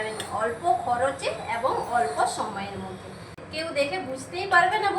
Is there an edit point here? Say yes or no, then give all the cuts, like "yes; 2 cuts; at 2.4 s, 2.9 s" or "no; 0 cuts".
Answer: yes; 1 cut; at 3.3 s